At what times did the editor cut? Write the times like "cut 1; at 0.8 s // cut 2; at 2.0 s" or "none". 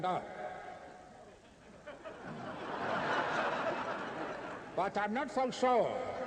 cut 1; at 1.2 s